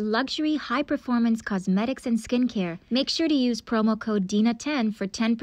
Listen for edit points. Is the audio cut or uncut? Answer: cut